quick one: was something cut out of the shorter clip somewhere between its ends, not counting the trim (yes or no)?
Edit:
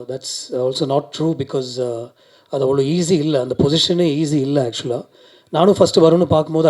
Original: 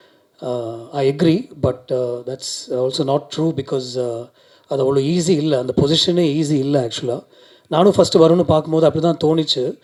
no